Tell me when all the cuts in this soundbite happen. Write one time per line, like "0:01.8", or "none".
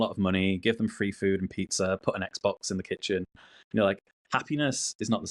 none

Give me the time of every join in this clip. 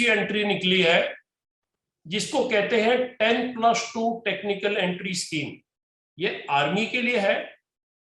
none

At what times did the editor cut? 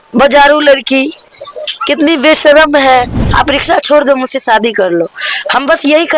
0:03.2

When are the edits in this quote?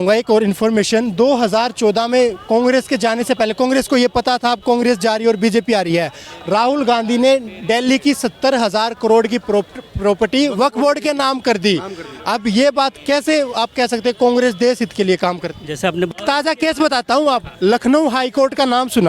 0:16.1

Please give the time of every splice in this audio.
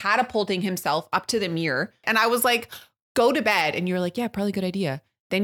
0:02.0

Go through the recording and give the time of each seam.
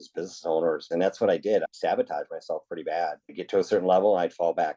0:01.7
0:03.3

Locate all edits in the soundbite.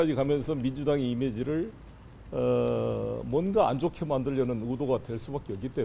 none

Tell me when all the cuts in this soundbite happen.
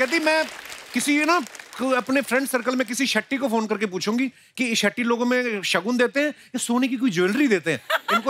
none

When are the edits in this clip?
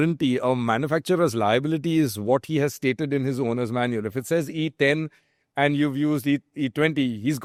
none

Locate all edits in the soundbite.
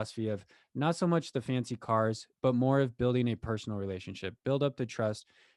none

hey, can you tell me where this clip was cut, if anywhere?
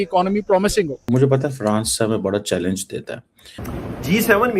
0:01.0
0:03.6

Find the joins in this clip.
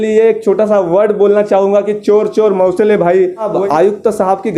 0:03.5

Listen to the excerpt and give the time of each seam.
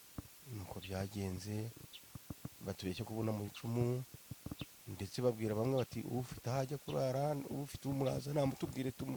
none

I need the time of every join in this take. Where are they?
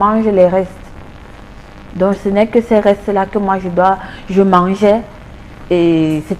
none

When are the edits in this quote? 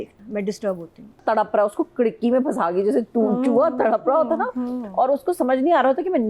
0:01.2

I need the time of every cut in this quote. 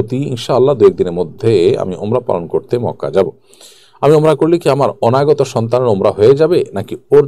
none

